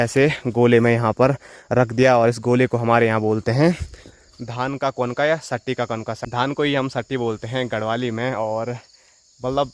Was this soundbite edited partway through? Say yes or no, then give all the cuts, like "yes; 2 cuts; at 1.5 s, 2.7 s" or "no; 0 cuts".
no; 0 cuts